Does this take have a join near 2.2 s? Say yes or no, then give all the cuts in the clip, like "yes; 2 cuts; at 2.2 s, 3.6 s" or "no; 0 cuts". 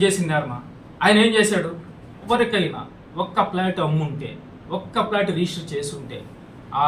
yes; 1 cut; at 2.2 s